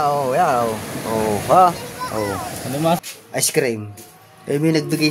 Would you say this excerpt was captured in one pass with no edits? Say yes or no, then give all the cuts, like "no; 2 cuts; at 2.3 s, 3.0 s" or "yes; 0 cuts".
no; 1 cut; at 3.2 s